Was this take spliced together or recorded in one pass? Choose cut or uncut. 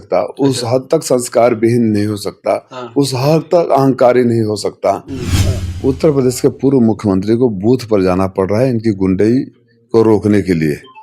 cut